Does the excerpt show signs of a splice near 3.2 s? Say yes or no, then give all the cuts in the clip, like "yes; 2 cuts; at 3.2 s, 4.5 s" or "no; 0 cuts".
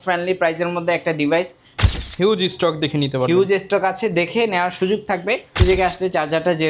no; 2 cuts; at 1.8 s, 5.6 s